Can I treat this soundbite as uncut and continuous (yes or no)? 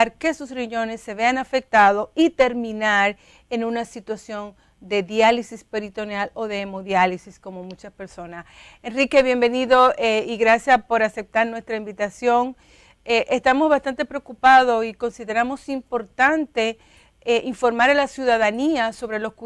no